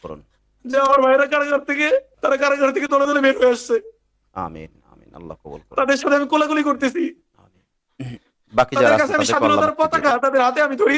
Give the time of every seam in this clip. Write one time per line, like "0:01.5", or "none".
none